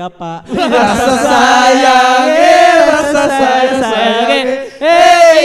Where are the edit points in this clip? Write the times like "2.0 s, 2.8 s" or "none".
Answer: none